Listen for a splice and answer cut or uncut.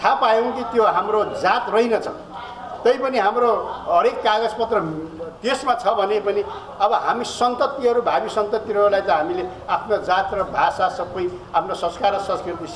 uncut